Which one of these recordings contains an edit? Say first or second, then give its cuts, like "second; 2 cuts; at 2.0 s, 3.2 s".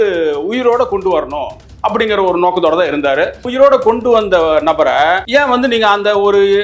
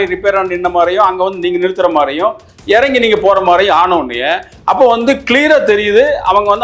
first; 2 cuts; at 3.5 s, 5.2 s